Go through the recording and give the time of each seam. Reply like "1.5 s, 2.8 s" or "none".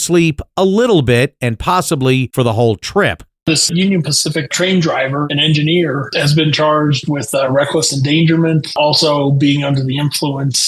none